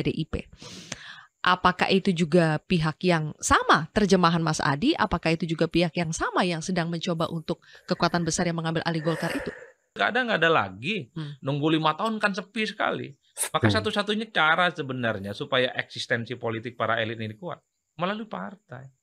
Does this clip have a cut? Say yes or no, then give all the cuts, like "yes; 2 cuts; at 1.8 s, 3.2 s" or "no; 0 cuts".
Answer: yes; 1 cut; at 10.0 s